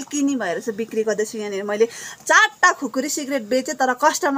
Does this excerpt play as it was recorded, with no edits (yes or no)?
yes